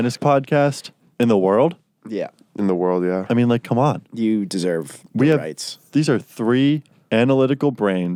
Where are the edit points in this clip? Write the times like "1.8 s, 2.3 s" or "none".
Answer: none